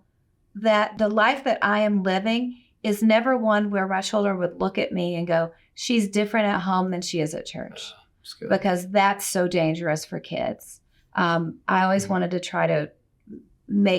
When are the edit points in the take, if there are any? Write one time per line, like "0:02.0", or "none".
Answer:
0:00.9